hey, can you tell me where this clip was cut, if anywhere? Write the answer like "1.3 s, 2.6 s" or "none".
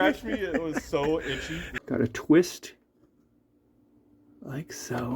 1.7 s